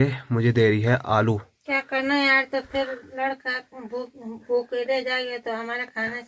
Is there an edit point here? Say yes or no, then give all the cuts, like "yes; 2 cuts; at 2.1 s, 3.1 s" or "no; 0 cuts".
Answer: no; 0 cuts